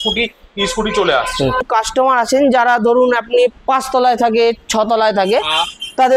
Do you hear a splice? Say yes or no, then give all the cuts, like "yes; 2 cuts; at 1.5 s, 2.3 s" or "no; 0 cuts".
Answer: yes; 1 cut; at 1.7 s